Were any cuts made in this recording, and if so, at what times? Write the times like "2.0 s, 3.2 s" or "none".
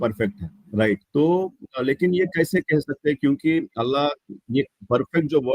1.0 s